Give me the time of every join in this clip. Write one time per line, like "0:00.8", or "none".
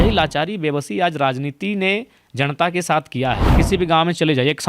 0:03.5